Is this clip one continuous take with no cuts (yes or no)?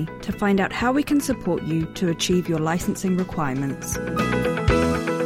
no